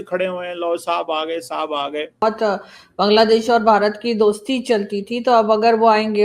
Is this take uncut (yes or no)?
no